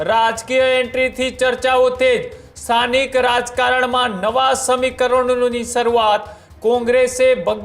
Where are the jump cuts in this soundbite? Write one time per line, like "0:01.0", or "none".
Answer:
none